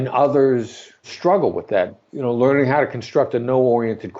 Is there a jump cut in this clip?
yes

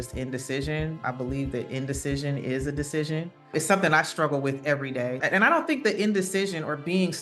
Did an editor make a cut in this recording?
yes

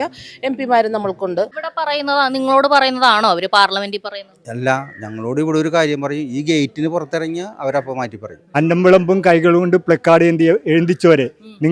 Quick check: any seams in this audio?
yes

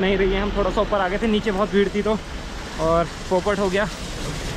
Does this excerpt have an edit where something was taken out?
no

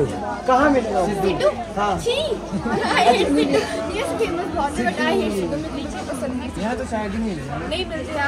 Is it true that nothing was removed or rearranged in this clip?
yes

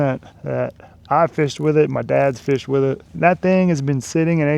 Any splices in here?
no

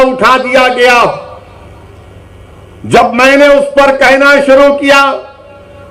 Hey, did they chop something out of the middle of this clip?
no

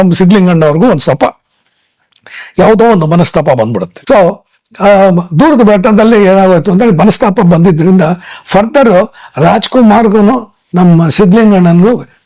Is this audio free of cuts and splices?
yes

